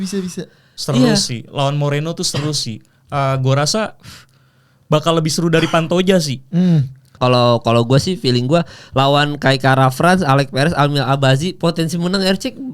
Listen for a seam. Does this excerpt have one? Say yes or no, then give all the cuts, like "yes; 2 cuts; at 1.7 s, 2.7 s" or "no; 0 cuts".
yes; 1 cut; at 7.1 s